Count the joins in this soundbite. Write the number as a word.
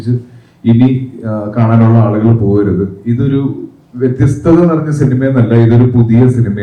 zero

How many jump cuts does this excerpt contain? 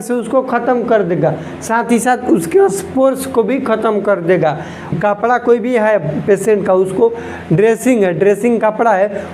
one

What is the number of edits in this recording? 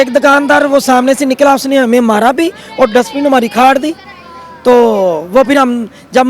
zero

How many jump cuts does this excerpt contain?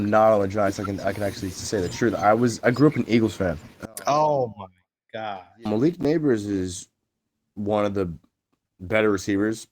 one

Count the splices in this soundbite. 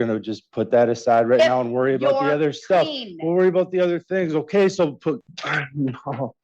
one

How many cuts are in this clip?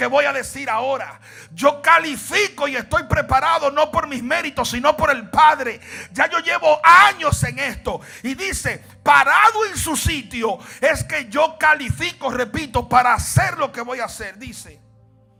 zero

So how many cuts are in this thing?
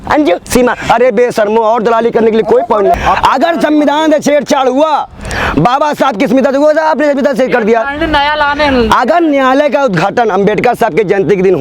one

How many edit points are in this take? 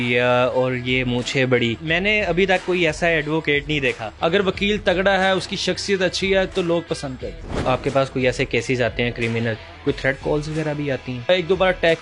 four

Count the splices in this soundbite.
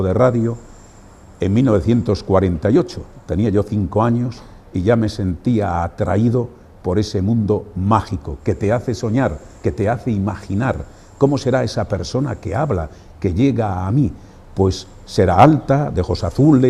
one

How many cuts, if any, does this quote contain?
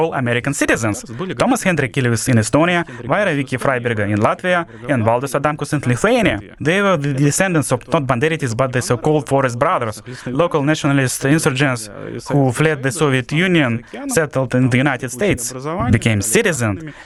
zero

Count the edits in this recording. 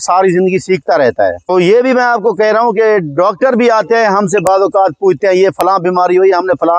one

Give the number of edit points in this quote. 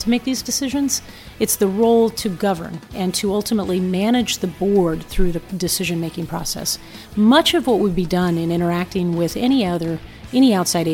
zero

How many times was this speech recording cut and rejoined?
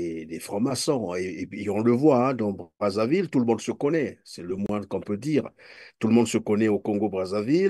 zero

